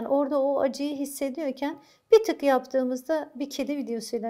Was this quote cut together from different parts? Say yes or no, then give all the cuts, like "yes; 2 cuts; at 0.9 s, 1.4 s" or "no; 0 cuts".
no; 0 cuts